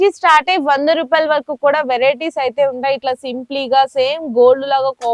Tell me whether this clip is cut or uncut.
uncut